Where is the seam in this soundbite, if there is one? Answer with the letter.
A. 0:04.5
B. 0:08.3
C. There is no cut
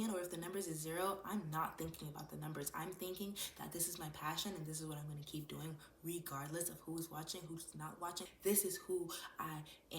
B